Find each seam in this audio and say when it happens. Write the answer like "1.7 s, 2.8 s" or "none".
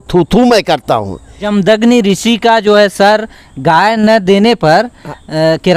1.4 s